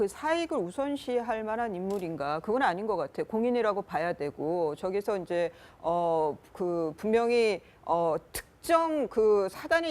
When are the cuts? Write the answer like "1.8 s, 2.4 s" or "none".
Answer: 4.8 s